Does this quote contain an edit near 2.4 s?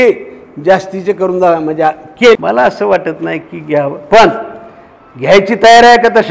yes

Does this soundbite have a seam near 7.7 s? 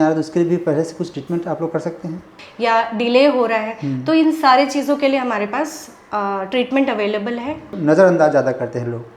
yes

